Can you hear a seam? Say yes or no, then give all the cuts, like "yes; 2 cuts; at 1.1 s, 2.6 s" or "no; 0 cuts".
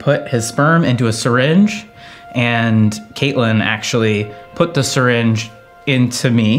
no; 0 cuts